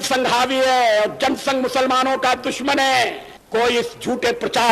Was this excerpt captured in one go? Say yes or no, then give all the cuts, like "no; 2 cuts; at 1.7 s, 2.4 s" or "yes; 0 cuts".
no; 1 cut; at 3.3 s